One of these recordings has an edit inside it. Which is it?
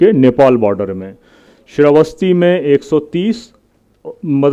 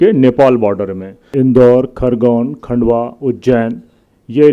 second; 1 cut; at 1.2 s

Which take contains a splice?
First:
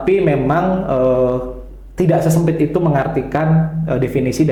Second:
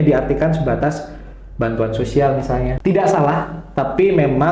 second; 1 cut; at 2.7 s

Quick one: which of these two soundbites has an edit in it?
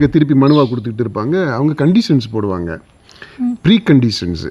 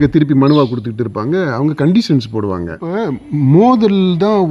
second; 1 cut; at 2.9 s

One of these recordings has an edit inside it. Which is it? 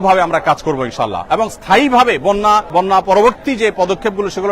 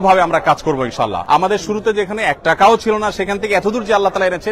second; 1 cut; at 1.2 s

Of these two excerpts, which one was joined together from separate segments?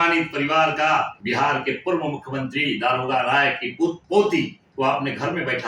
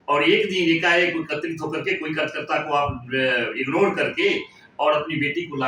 first; 3 cuts; at 1.2 s, 4.0 s, 4.6 s

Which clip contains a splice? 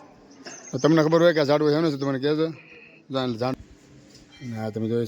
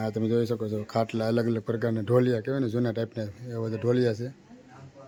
first; 1 cut; at 3.5 s

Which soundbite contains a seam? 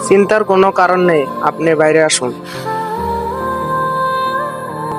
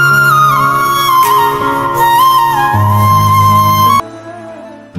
second; 1 cut; at 4.0 s

